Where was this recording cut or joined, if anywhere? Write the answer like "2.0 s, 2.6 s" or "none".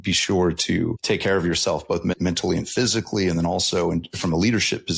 1.0 s, 2.2 s